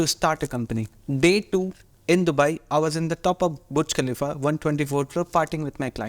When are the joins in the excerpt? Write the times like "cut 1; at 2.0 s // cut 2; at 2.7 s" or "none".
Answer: cut 1; at 0.9 s // cut 2; at 1.9 s